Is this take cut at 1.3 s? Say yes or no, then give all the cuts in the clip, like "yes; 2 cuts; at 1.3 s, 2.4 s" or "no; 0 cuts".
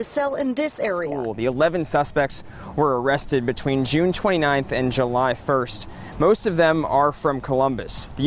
yes; 1 cut; at 1.3 s